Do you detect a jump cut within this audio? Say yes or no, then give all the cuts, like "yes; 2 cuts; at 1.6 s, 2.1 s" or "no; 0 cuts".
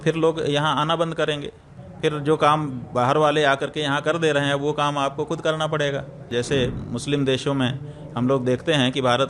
yes; 1 cut; at 6.2 s